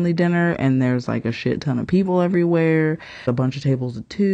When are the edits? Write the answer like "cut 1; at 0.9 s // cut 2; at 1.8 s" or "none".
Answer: cut 1; at 3.2 s